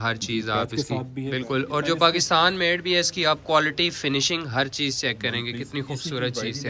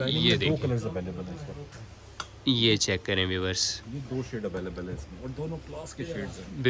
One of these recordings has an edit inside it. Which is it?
first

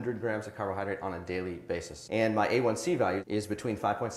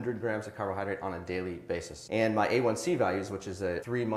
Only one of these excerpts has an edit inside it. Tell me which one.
first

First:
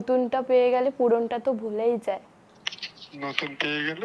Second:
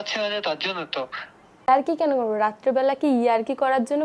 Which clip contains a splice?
second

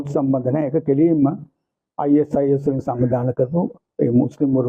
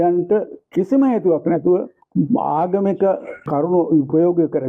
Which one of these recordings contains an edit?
second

